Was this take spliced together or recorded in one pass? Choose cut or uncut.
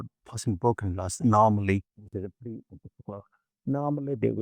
cut